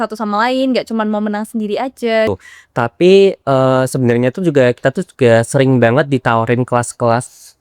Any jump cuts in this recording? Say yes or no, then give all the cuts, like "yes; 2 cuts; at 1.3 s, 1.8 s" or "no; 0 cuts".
yes; 1 cut; at 2.3 s